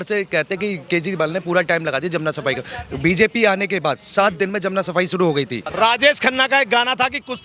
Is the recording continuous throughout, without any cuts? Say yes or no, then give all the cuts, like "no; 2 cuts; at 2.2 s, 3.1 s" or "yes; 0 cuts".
no; 1 cut; at 5.7 s